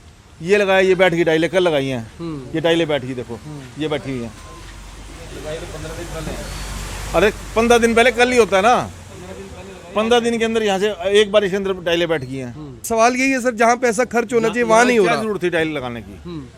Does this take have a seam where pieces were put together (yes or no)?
yes